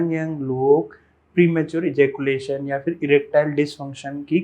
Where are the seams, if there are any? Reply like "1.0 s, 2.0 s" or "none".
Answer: none